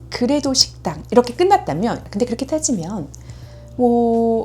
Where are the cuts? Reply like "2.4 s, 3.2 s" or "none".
2.0 s